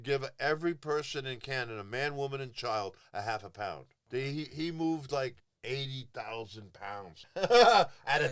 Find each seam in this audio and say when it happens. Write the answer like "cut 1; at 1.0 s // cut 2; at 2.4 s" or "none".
cut 1; at 3.9 s // cut 2; at 5.5 s // cut 3; at 7.2 s